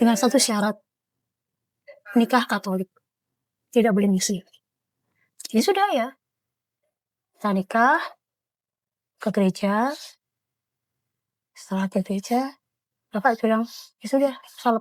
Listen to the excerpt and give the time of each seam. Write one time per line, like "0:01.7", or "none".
none